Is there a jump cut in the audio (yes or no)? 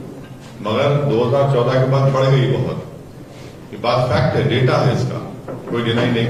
no